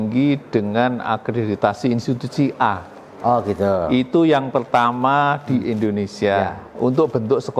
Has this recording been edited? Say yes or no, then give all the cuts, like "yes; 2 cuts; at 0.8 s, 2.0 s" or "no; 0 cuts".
no; 0 cuts